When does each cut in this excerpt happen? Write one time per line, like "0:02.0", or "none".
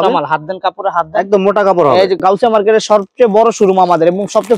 0:02.2